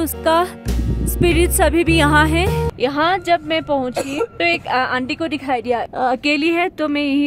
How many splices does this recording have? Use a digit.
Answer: 2